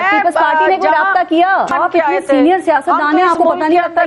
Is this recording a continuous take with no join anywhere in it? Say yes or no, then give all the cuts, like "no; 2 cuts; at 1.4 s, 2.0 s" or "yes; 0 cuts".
no; 1 cut; at 1.7 s